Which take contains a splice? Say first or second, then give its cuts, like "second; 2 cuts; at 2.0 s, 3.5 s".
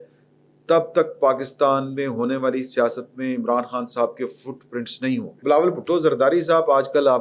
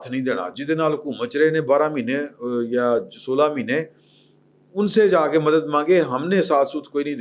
first; 1 cut; at 5.4 s